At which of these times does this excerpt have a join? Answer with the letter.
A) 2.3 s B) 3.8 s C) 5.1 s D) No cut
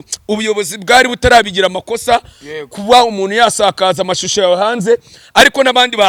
D